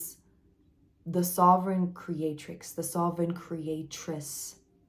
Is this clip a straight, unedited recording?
yes; 0 cuts

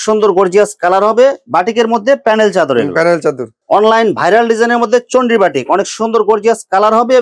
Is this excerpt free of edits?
no; 1 cut; at 3.5 s

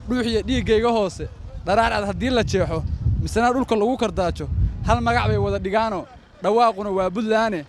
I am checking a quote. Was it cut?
no; 0 cuts

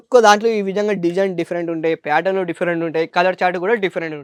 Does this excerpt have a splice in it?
no; 0 cuts

